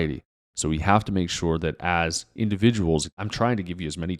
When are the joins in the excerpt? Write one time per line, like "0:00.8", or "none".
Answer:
0:03.1